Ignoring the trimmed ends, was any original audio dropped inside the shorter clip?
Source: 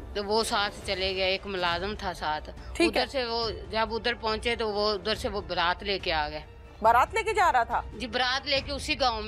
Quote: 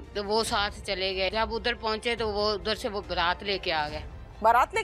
yes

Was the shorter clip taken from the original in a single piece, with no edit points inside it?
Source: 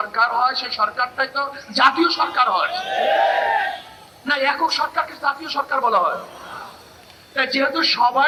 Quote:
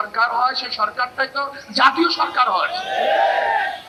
yes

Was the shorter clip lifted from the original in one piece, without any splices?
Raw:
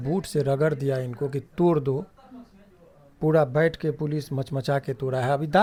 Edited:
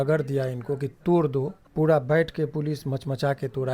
no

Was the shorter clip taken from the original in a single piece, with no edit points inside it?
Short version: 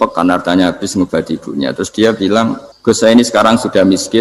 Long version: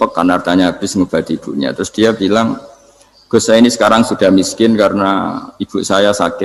no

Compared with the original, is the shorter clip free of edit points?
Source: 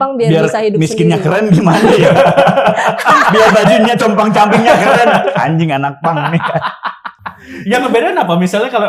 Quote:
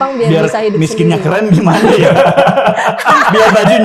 yes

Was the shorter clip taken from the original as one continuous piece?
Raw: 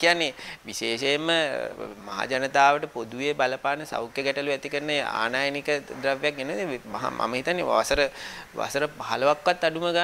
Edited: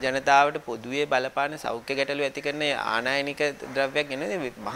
yes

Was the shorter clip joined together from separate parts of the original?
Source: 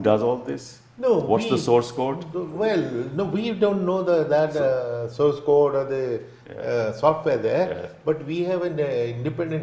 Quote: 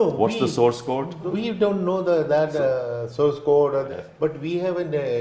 yes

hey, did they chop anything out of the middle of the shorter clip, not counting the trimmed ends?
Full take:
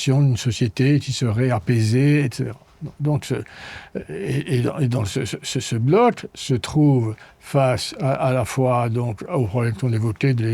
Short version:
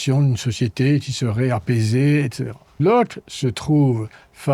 yes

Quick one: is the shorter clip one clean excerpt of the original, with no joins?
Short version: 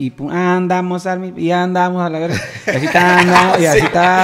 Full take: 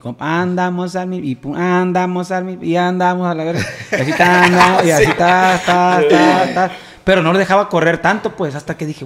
yes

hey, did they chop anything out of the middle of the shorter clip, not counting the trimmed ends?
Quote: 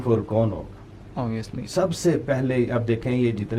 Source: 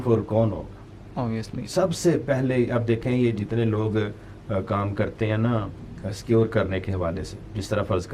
no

